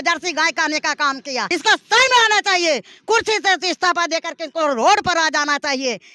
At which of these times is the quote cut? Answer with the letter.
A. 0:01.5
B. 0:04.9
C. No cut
A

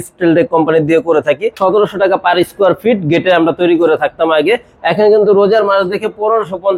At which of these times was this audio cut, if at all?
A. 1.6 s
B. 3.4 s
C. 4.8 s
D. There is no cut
A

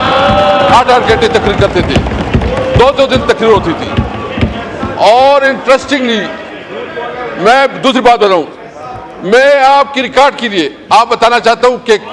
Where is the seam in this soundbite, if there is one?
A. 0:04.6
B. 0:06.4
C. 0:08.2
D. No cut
D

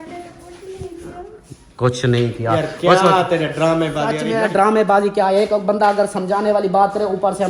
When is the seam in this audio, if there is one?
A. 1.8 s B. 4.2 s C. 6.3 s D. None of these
B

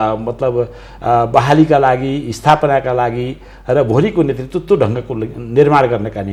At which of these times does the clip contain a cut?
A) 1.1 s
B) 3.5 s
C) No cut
C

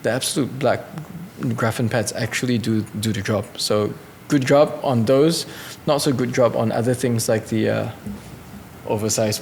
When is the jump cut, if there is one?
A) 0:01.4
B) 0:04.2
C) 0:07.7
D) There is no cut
D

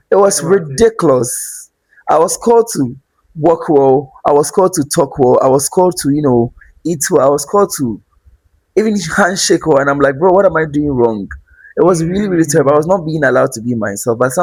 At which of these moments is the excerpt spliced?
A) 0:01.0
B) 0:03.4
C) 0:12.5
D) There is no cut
D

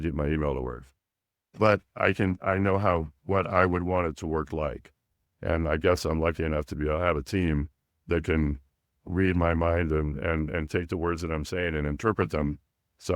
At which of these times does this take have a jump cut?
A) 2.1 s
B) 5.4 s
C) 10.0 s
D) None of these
D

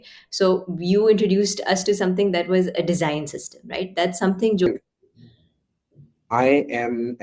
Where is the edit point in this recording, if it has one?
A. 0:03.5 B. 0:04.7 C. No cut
B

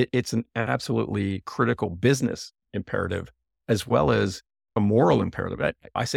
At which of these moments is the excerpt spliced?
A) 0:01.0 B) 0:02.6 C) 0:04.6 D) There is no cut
B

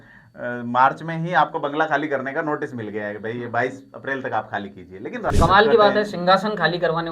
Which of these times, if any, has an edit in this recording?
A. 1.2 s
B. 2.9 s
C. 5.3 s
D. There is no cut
C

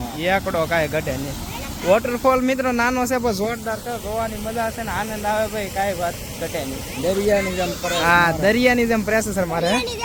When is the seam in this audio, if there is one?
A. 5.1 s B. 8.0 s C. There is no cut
C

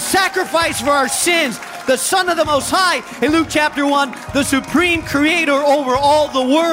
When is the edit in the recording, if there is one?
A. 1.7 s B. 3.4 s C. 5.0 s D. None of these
A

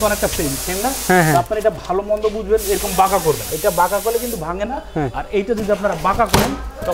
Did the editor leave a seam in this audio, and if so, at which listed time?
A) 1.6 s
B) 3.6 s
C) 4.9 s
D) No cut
D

